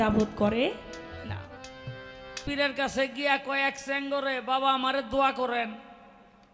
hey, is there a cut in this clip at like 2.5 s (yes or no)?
yes